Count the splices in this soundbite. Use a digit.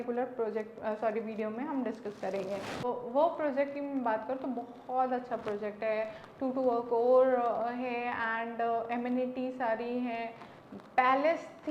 1